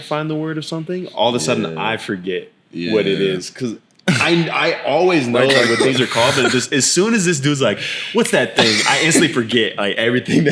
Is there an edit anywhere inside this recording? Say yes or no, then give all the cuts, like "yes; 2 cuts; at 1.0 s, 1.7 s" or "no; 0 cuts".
no; 0 cuts